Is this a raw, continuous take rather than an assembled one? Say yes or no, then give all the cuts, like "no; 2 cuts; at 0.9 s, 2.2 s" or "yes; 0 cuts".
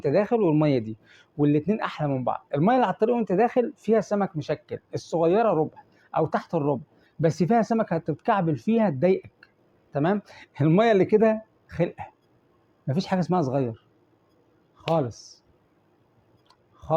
yes; 0 cuts